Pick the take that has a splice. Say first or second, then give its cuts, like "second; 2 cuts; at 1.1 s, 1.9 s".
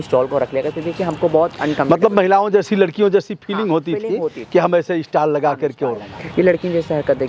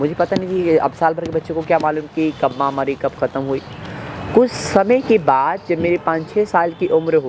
first; 1 cut; at 6.1 s